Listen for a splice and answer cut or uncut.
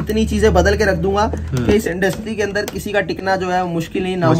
uncut